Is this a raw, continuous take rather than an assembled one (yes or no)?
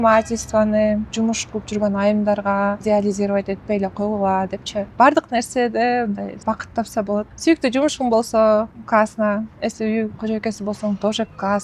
no